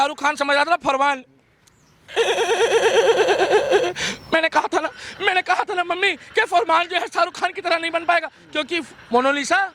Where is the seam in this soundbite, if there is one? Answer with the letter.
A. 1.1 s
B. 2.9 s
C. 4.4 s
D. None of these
D